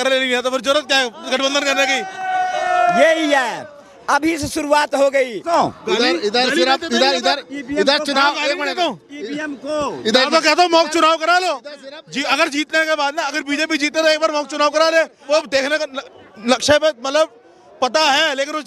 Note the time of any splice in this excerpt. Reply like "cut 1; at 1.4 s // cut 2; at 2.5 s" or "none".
cut 1; at 5.5 s // cut 2; at 15.2 s